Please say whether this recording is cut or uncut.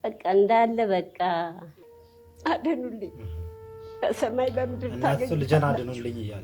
cut